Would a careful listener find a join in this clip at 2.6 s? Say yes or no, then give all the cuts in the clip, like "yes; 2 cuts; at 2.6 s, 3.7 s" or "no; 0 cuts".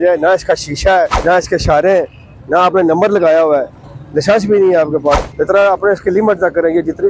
no; 2 cuts; at 1.2 s, 5.3 s